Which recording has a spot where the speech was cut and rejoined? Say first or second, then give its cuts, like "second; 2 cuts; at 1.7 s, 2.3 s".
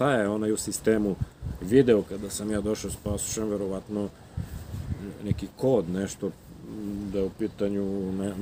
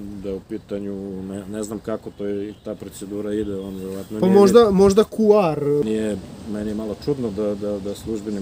second; 1 cut; at 5.8 s